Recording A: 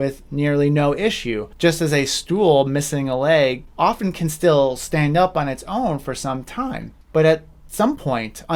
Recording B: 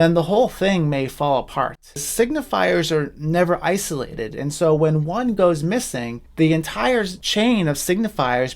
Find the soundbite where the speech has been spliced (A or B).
B